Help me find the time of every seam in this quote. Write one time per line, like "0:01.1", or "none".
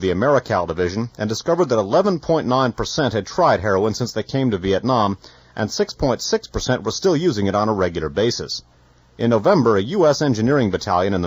0:09.7